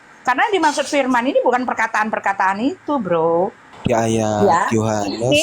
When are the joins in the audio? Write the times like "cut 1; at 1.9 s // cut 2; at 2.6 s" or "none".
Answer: cut 1; at 3.7 s